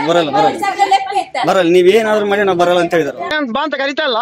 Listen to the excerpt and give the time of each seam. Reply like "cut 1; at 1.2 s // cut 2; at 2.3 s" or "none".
cut 1; at 3.3 s